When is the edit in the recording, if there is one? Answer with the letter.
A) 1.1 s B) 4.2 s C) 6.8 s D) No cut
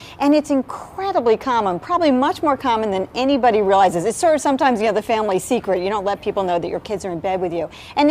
A